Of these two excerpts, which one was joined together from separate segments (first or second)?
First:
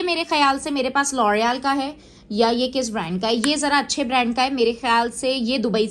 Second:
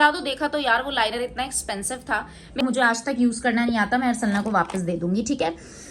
second